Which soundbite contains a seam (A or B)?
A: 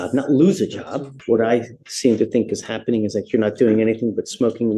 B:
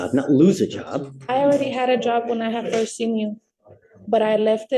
A